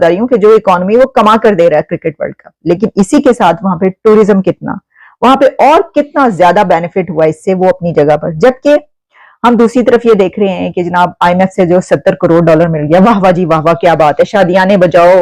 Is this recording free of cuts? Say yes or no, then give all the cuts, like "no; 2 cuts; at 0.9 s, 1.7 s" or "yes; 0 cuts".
yes; 0 cuts